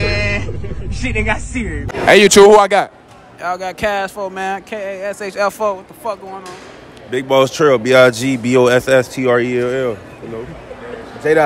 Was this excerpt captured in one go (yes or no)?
yes